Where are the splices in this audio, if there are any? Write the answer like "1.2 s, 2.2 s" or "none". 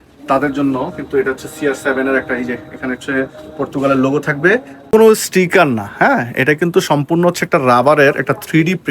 4.8 s